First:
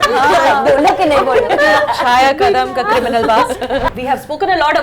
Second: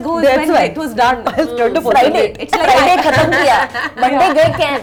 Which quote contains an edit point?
first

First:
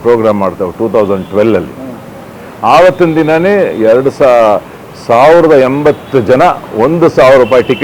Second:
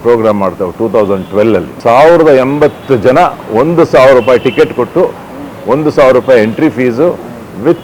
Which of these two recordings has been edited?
second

